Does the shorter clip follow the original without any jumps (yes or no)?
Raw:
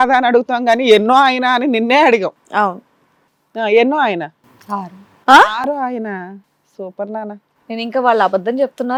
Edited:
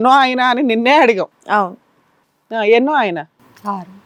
yes